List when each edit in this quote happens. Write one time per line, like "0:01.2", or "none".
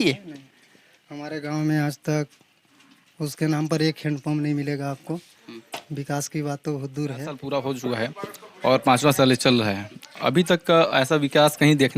0:07.4